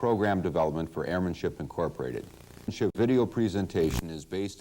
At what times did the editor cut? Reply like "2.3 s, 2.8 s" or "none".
2.9 s

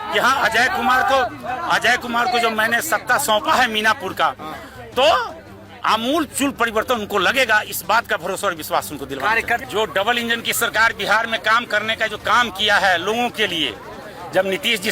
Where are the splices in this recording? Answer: 9.6 s

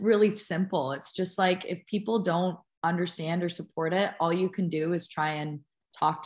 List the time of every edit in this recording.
none

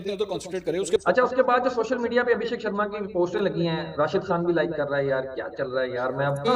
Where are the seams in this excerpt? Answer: 1.0 s

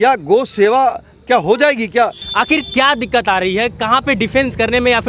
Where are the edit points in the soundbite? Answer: 2.2 s

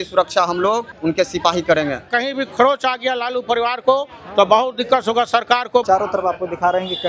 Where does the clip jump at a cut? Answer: 0.9 s, 2.1 s, 5.8 s

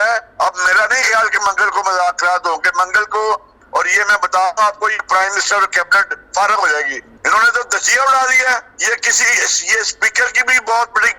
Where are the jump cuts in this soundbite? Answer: 3.5 s, 7.0 s

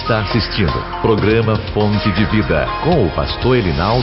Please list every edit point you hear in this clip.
none

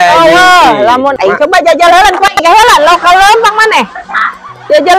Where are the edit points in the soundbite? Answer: 1.2 s

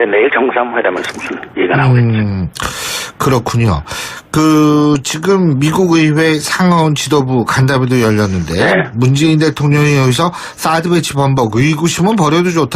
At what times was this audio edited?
4.7 s

